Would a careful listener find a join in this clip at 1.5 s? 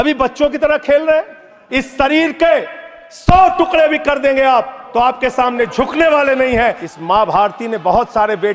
yes; 2 cuts; at 1.5 s, 6.8 s

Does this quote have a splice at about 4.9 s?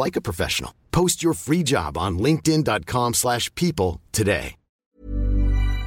yes; 1 cut; at 4.9 s

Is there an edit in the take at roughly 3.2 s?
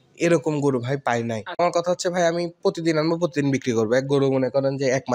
no; 1 cut; at 1.6 s

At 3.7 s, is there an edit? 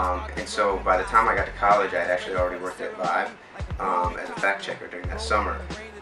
yes; 1 cut; at 3.7 s

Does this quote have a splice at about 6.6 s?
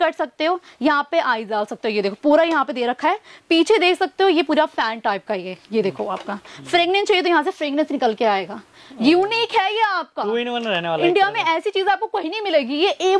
no; 0 cuts

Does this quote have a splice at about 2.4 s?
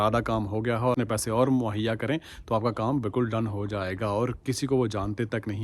no; 1 cut; at 1.0 s

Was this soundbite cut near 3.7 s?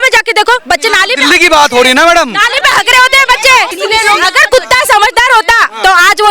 yes; 1 cut; at 3.7 s

